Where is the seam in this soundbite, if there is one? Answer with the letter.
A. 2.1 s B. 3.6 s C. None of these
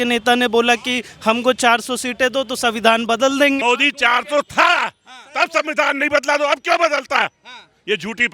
B